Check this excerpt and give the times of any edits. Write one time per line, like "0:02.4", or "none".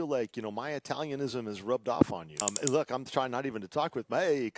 0:02.5